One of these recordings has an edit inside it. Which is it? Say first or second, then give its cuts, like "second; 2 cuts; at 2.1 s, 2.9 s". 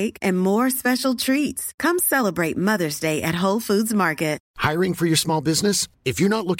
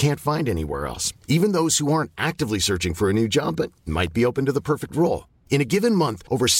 first; 1 cut; at 4.5 s